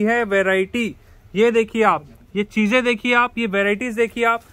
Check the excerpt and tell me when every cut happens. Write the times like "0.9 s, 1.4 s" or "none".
none